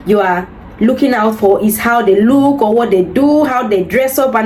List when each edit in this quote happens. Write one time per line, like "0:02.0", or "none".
none